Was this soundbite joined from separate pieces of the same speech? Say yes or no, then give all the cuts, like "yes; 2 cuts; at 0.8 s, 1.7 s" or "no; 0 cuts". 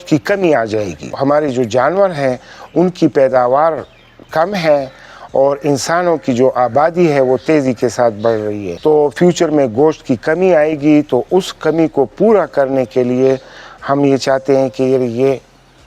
yes; 2 cuts; at 1.1 s, 8.7 s